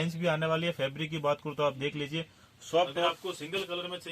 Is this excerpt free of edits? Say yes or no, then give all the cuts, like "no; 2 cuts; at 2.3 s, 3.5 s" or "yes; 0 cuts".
no; 1 cut; at 3.1 s